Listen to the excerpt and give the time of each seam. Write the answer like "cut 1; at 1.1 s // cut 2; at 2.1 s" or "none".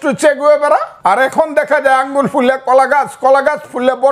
cut 1; at 0.9 s